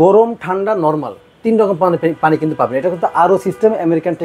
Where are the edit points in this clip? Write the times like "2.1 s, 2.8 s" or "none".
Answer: none